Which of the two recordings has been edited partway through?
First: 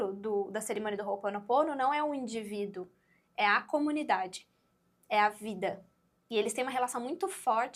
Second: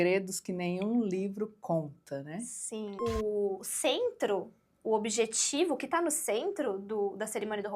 second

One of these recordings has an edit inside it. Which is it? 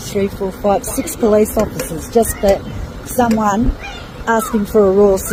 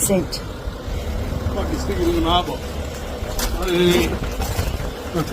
second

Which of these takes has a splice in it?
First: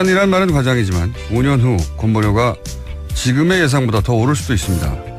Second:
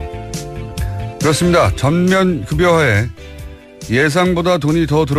first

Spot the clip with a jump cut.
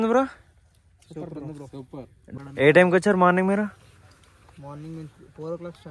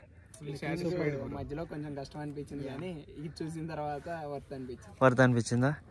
first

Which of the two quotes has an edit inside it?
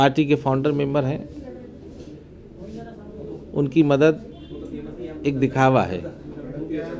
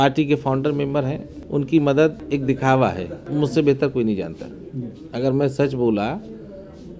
second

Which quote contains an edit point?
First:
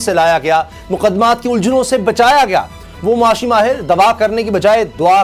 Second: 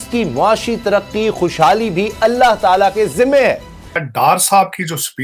second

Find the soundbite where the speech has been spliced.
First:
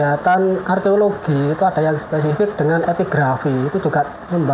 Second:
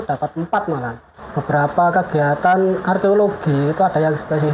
second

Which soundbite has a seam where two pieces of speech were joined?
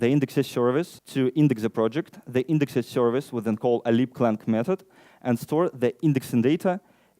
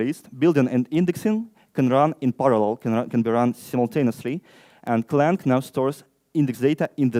first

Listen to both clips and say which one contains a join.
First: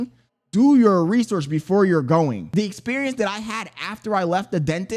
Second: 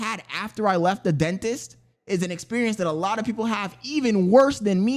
first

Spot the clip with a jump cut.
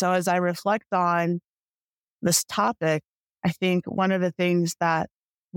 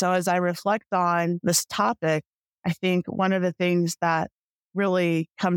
second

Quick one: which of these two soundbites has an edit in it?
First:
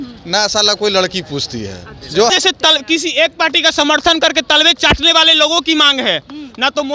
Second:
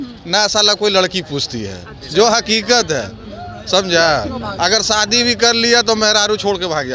first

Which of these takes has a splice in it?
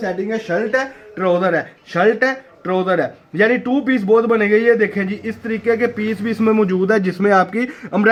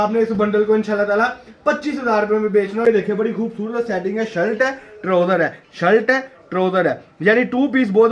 second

